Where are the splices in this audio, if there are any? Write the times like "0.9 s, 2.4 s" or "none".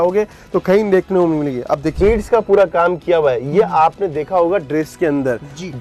1.9 s